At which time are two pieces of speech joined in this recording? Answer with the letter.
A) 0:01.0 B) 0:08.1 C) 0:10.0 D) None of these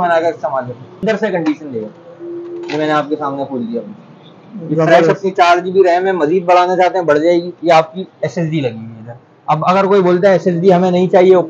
A